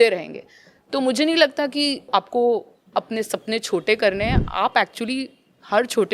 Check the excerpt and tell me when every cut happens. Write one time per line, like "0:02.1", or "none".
0:02.1